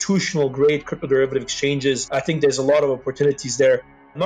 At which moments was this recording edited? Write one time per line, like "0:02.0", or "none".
0:02.0